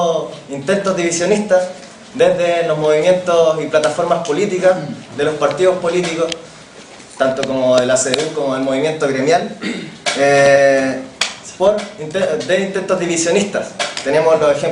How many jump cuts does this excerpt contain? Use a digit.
1